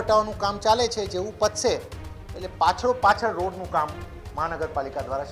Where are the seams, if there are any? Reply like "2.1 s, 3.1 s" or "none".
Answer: none